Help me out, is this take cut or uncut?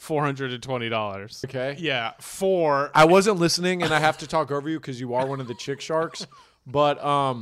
cut